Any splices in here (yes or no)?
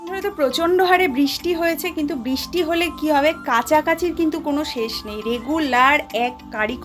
no